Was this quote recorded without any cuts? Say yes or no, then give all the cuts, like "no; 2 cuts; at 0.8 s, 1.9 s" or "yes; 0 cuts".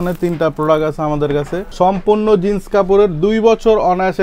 no; 1 cut; at 1.7 s